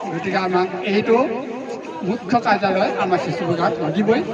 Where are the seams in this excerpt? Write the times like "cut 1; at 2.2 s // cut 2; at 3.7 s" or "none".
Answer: none